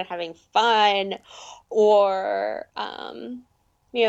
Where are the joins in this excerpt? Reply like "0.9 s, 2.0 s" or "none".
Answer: none